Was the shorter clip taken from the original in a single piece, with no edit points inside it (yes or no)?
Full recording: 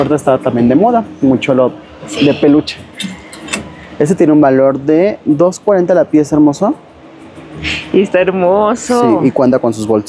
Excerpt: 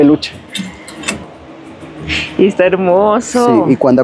no